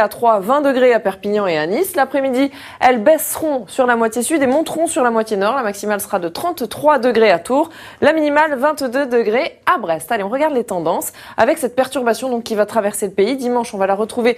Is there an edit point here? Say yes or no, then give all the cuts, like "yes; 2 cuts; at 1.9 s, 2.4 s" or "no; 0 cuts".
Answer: yes; 1 cut; at 4.9 s